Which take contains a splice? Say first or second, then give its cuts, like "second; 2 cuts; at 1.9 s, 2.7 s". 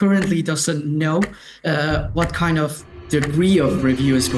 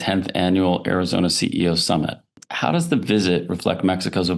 second; 1 cut; at 2.4 s